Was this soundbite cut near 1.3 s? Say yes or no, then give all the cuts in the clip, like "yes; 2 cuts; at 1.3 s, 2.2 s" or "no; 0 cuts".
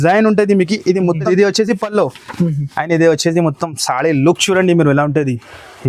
yes; 1 cut; at 1.3 s